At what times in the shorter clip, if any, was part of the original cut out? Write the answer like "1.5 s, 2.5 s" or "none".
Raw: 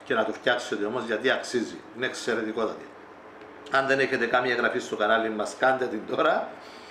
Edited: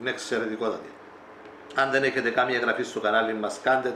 none